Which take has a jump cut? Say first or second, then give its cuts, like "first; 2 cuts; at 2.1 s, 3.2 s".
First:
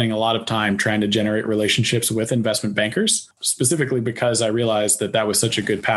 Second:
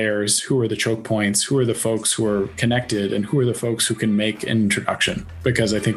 first; 1 cut; at 3.4 s